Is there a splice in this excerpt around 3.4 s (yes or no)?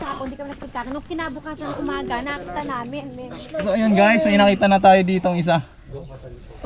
yes